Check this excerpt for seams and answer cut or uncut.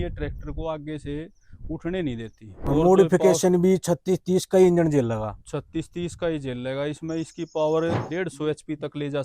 cut